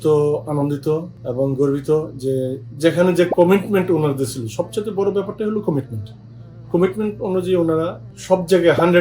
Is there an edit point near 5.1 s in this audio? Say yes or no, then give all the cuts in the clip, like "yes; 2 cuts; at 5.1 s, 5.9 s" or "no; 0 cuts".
no; 2 cuts; at 1.2 s, 8.1 s